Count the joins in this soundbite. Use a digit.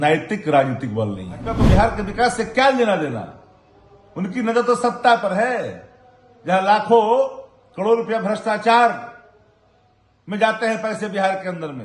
1